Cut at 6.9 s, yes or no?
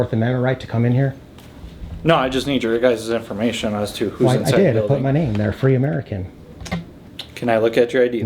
yes